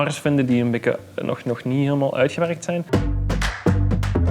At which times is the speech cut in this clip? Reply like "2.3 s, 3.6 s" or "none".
2.8 s